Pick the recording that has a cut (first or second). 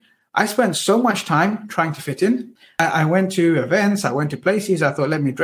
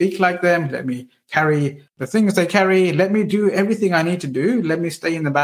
first